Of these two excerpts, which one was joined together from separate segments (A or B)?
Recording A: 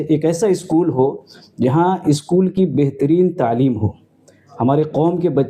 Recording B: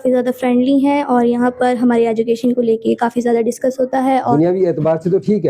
B